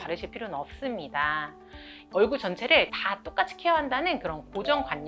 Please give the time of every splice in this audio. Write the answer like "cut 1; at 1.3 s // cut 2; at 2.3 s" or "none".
cut 1; at 2.0 s